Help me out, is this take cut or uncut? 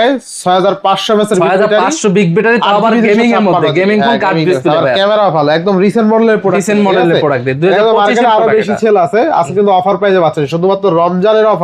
uncut